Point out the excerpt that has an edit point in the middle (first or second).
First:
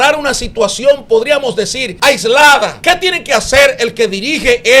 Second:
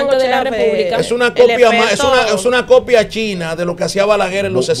first